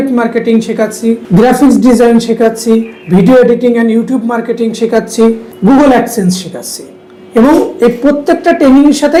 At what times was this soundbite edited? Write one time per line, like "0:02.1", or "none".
none